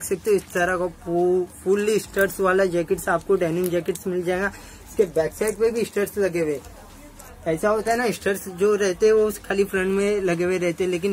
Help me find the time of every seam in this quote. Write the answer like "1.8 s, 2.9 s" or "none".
none